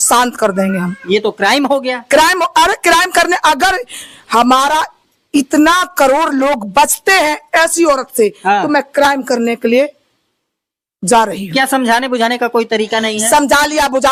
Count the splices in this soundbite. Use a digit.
0